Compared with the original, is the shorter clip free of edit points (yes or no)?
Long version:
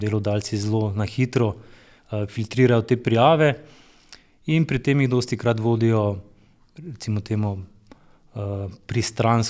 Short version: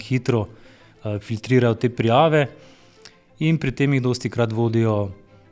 yes